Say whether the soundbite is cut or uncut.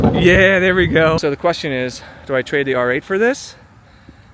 cut